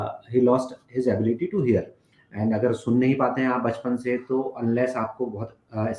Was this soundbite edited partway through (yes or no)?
no